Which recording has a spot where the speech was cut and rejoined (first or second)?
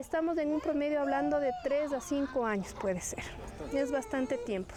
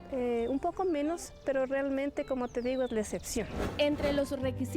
second